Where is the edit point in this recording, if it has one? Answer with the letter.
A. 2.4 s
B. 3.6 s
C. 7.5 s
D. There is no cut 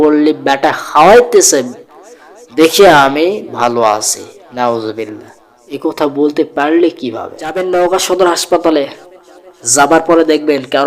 C